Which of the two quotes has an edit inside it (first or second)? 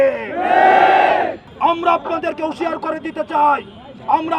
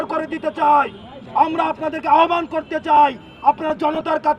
first